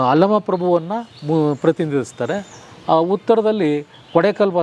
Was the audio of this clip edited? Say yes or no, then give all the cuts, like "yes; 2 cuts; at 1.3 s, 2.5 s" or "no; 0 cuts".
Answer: no; 0 cuts